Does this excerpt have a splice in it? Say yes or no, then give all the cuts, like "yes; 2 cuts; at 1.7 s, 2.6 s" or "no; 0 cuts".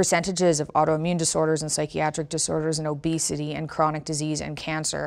no; 0 cuts